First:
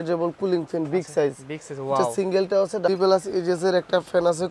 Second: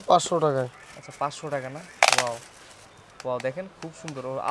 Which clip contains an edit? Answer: first; 1 cut; at 2.9 s

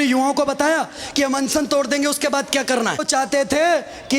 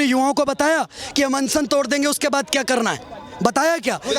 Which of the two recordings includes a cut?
first; 1 cut; at 3.0 s

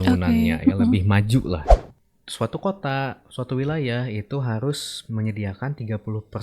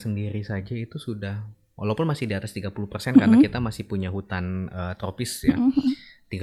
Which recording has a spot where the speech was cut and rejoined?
first; 1 cut; at 1.8 s

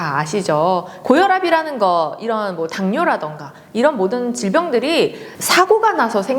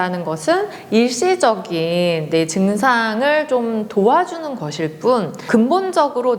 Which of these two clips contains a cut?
first; 1 cut; at 0.9 s

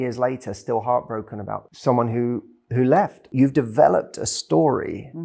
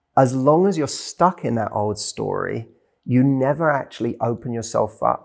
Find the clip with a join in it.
first; 2 cuts; at 1.7 s, 3.3 s

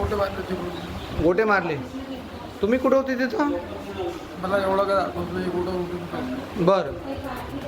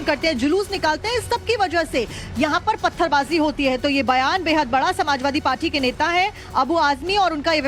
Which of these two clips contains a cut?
first; 1 cut; at 5.5 s

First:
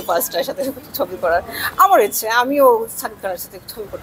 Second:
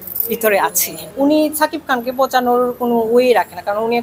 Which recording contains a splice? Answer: second; 1 cut; at 1.1 s

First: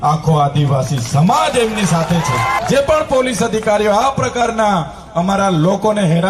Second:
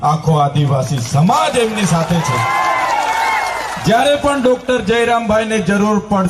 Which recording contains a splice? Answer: first; 1 cut; at 2.6 s

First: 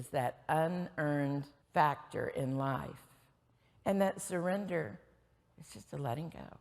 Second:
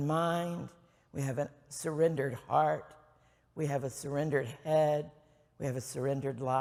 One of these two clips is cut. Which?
first; 1 cut; at 1.5 s

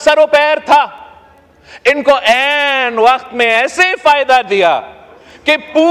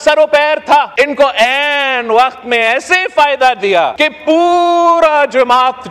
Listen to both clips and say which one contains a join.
second; 2 cuts; at 0.9 s, 3.9 s

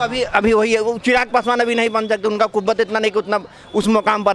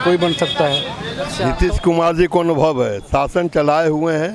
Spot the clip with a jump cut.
second; 1 cut; at 1.3 s

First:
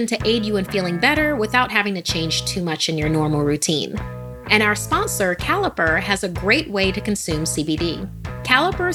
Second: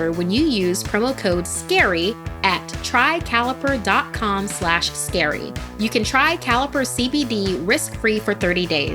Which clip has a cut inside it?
second; 1 cut; at 5.6 s

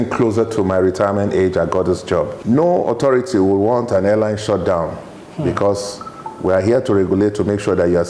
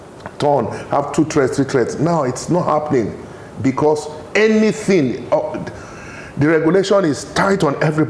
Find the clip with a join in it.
first; 1 cut; at 2.3 s

